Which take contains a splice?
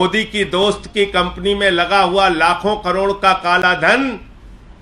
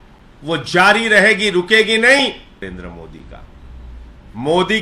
second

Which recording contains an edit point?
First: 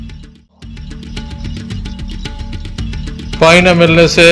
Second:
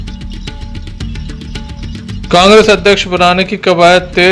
second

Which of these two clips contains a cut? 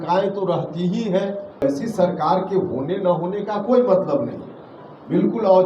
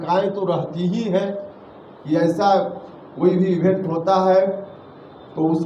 first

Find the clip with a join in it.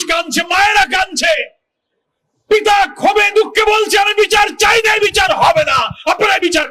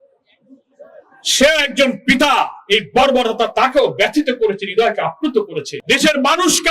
second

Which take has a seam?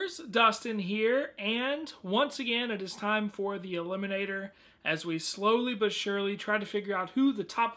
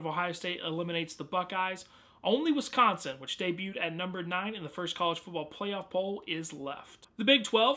second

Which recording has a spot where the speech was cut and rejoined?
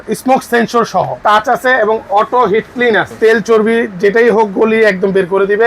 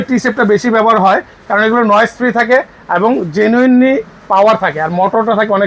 first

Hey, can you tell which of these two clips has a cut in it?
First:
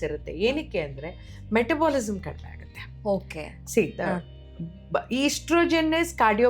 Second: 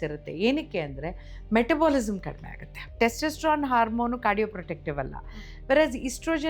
second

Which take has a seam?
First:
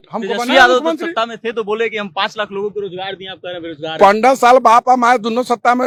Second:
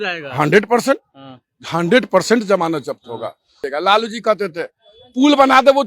second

